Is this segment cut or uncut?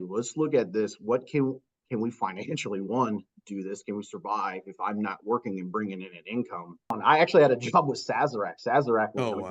cut